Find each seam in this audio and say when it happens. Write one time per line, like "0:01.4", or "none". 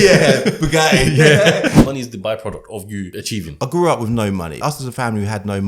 0:01.8
0:03.4
0:04.6